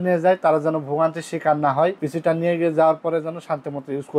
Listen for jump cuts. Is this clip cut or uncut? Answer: cut